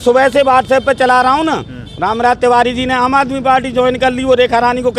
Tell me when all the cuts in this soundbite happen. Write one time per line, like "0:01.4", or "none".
none